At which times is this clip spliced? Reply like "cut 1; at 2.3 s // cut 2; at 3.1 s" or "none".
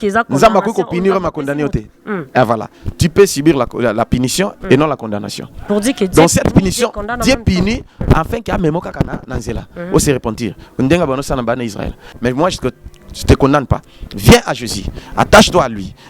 cut 1; at 12.0 s